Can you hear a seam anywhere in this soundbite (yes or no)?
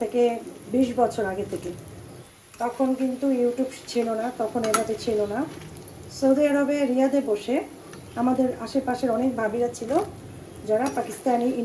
no